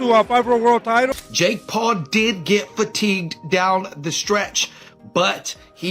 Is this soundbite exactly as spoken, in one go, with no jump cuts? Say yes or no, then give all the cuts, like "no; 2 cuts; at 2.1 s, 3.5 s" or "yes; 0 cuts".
no; 1 cut; at 1.1 s